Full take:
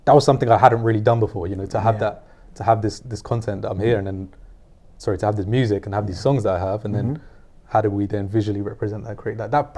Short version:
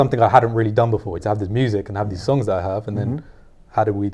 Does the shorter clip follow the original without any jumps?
no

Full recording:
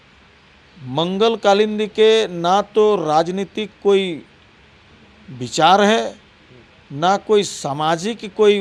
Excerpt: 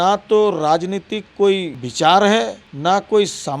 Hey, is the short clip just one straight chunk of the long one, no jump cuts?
no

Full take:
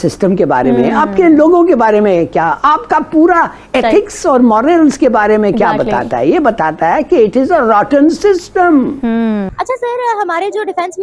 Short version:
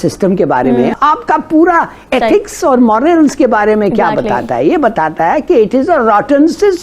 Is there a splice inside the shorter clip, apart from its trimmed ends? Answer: yes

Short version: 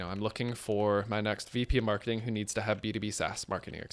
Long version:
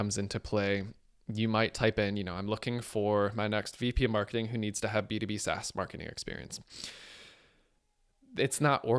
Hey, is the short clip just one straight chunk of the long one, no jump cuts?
yes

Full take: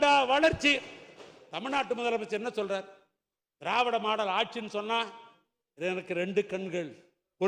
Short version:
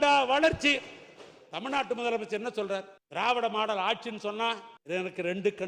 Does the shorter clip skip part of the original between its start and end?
yes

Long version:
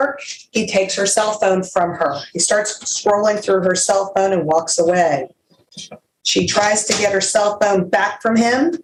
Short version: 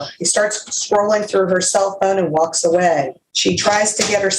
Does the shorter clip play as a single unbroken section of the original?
no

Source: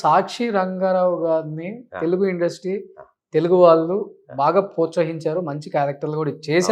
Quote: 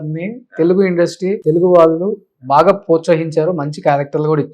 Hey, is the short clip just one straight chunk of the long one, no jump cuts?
no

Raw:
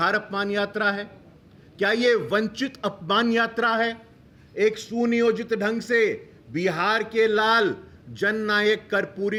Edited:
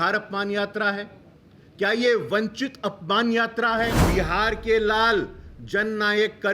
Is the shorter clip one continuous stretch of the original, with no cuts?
no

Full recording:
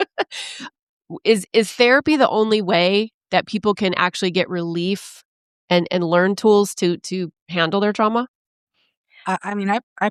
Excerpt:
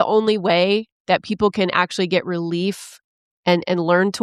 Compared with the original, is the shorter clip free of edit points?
yes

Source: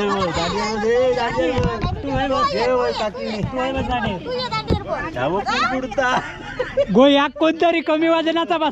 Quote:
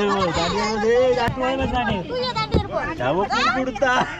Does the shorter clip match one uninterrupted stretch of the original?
no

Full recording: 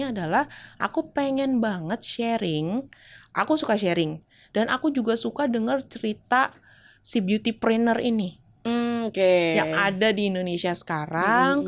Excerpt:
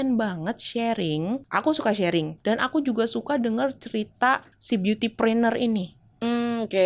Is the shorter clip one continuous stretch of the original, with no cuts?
no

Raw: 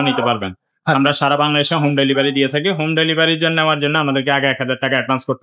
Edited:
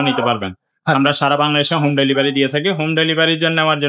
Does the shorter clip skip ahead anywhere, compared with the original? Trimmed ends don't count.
no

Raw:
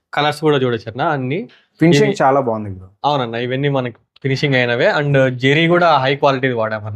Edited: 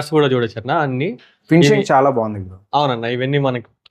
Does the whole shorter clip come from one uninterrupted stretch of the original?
yes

